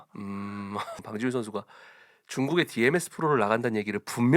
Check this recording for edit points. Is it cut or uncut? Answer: cut